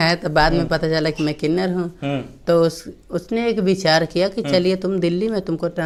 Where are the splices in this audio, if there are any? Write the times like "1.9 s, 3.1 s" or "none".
none